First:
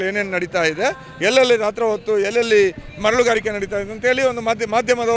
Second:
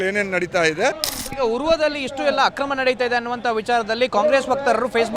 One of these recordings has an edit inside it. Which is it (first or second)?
second